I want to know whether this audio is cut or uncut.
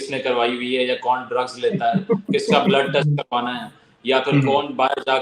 uncut